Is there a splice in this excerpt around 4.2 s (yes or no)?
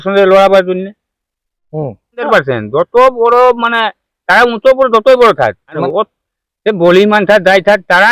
no